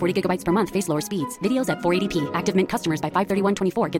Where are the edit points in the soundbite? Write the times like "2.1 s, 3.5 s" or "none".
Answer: none